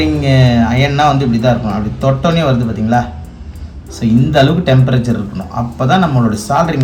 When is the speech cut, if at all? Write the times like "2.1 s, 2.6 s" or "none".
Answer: none